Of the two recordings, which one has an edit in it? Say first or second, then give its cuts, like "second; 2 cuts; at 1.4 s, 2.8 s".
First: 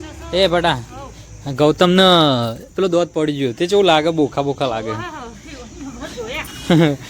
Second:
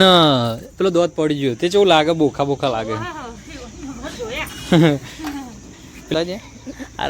second; 1 cut; at 6.1 s